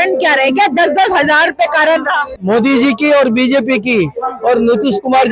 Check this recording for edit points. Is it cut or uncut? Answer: cut